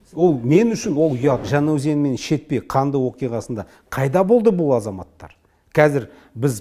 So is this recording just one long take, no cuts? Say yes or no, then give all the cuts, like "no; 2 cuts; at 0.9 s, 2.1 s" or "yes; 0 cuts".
no; 1 cut; at 1.4 s